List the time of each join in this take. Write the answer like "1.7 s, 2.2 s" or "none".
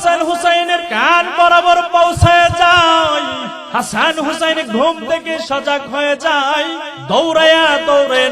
0.9 s, 3.6 s, 6.9 s